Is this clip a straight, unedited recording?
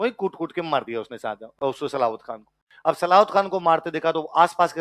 yes; 0 cuts

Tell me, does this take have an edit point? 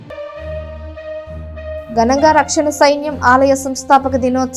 no; 0 cuts

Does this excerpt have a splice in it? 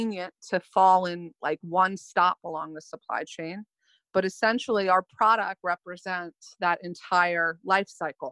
no; 0 cuts

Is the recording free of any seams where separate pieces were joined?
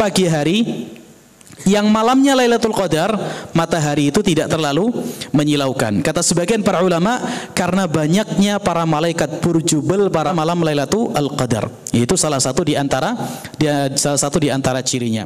no; 1 cut; at 10.3 s

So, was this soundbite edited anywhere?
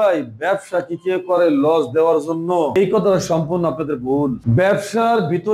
no; 0 cuts

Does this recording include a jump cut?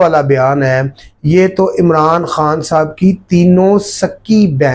no; 0 cuts

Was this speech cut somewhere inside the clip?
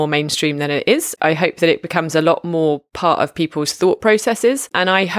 yes; 1 cut; at 1.1 s

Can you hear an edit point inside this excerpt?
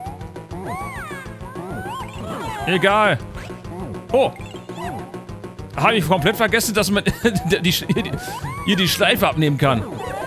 no; 0 cuts

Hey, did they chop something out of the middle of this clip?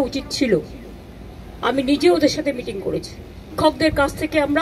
yes; 1 cut; at 3.5 s

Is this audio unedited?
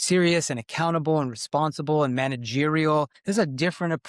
no; 1 cut; at 3.2 s

